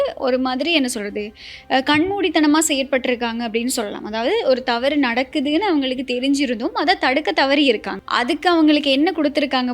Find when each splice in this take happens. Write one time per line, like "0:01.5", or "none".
0:08.0